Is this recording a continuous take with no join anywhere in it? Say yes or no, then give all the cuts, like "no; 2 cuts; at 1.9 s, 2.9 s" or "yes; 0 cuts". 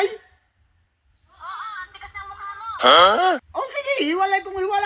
no; 2 cuts; at 2.7 s, 3.5 s